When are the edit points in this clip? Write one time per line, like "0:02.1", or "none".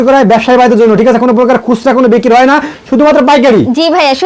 none